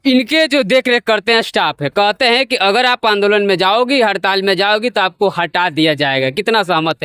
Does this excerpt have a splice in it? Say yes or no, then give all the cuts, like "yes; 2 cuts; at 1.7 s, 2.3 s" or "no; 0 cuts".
no; 0 cuts